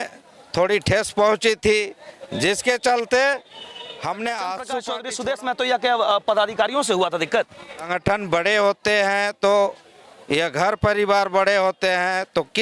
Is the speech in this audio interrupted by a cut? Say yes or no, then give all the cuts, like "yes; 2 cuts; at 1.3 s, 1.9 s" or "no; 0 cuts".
yes; 2 cuts; at 5.0 s, 7.9 s